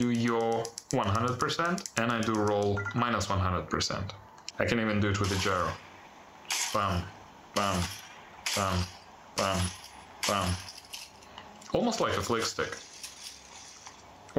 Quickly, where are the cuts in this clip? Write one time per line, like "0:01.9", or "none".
0:01.9
0:04.4